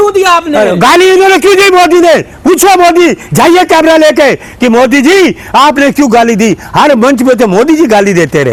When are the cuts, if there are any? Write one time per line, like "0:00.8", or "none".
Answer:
none